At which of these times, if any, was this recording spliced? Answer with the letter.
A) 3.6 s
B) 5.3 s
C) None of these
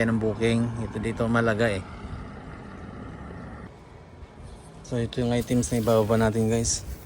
A